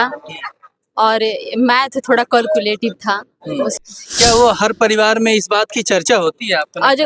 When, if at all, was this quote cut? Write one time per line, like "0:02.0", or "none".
0:03.7